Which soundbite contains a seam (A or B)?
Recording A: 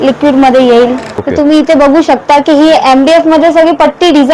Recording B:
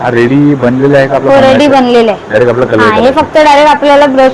A